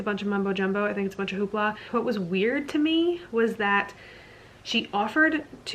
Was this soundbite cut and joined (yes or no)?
yes